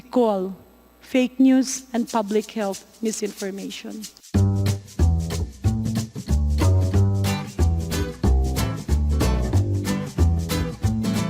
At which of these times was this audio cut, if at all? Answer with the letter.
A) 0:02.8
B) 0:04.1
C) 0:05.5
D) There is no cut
B